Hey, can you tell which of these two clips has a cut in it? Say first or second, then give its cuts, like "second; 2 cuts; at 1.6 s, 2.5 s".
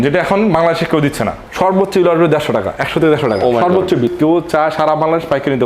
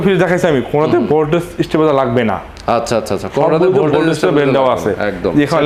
first; 2 cuts; at 1.4 s, 4.1 s